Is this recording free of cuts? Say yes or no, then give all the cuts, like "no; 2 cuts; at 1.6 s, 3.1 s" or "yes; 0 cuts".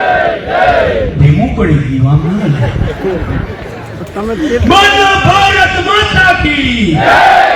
yes; 0 cuts